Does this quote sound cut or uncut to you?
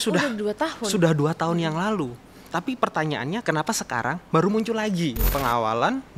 cut